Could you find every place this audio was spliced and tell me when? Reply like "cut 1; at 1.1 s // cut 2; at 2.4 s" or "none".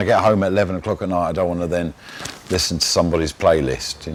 none